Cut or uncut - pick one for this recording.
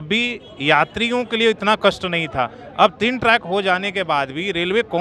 uncut